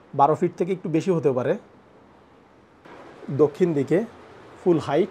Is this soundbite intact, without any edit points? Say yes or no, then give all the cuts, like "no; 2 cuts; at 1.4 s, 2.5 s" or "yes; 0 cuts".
no; 1 cut; at 2.8 s